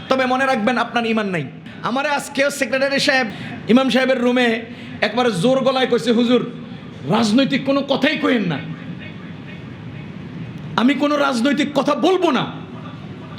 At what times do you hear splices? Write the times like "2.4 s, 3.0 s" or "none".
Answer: 1.6 s, 3.3 s